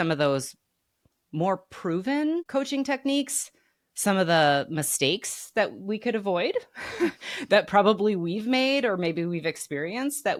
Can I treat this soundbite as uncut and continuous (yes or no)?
yes